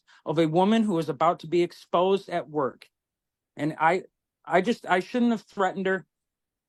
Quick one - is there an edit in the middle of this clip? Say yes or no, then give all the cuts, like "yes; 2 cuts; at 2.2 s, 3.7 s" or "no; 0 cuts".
no; 0 cuts